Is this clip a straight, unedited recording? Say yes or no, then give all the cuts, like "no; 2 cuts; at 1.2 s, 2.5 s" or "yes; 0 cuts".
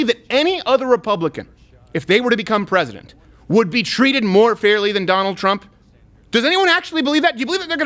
yes; 0 cuts